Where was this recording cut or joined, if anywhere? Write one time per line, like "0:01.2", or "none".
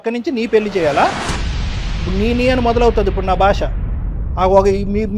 none